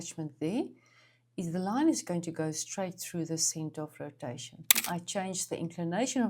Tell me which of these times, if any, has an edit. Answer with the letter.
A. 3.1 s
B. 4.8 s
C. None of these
B